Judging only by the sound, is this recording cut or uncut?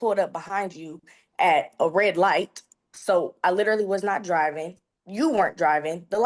uncut